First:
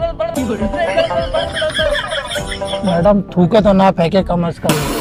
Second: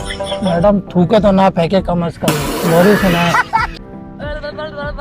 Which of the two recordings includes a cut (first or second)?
second